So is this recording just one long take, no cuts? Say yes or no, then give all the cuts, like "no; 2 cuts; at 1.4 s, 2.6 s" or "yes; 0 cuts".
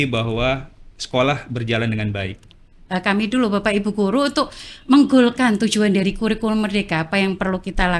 no; 1 cut; at 2.8 s